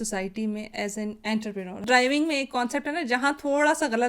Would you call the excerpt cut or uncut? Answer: cut